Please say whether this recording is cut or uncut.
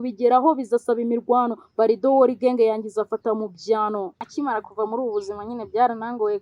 cut